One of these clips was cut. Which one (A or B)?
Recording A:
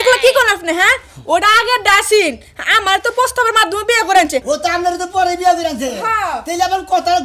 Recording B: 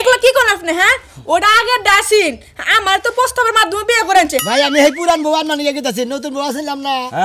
B